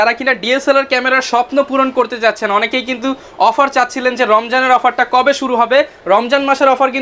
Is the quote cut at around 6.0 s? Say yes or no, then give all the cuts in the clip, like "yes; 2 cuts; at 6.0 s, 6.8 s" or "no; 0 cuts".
no; 0 cuts